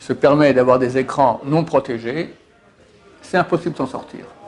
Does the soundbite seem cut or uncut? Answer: uncut